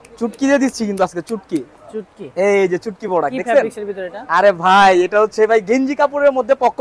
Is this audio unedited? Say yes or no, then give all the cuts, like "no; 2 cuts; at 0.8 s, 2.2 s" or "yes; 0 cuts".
yes; 0 cuts